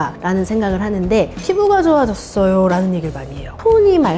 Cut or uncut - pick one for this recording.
cut